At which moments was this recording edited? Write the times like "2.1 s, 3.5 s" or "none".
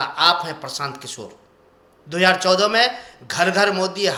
none